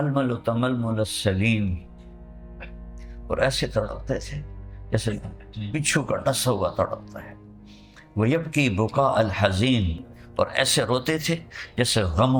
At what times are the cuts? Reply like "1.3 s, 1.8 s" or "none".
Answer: none